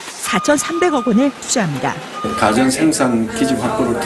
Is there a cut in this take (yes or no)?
no